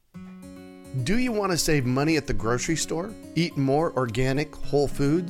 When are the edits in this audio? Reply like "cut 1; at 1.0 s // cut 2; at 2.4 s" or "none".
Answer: cut 1; at 0.9 s